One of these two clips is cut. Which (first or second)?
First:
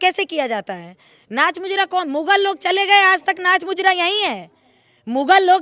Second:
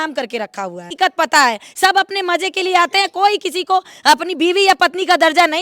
second